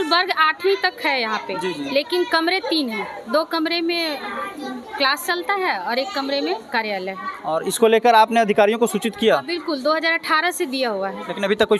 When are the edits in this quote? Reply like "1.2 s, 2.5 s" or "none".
none

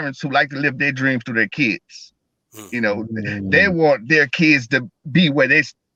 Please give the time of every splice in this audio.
none

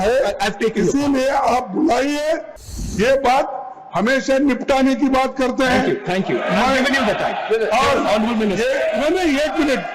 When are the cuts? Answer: 2.6 s

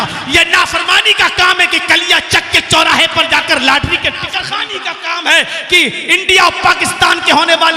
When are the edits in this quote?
4.4 s

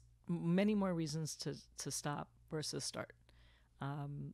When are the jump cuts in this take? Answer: none

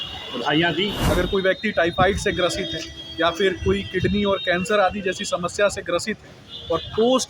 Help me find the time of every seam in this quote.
1.0 s

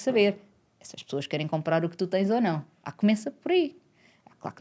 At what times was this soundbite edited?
none

